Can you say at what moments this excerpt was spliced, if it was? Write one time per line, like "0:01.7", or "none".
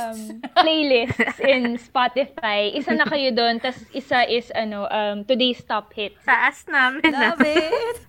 0:06.2